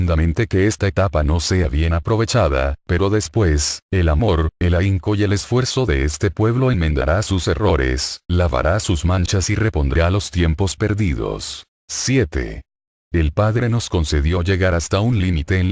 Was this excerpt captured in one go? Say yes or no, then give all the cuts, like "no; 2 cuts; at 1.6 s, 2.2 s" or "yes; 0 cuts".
no; 1 cut; at 2.4 s